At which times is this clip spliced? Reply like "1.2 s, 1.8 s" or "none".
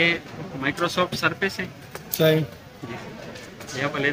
none